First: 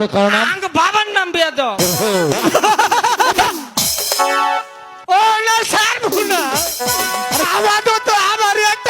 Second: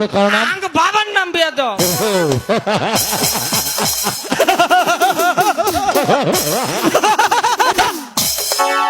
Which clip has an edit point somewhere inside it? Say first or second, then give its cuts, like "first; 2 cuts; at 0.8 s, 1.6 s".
first; 2 cuts; at 2.4 s, 4.9 s